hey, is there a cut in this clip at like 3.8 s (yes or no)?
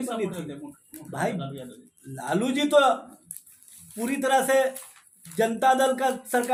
no